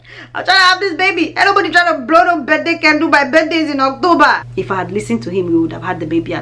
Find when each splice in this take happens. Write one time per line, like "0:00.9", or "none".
0:04.4